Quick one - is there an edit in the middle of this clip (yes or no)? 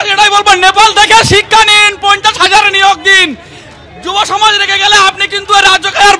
no